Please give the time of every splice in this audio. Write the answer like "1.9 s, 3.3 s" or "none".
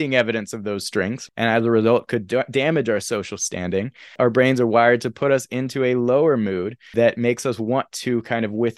1.2 s, 4.1 s, 6.9 s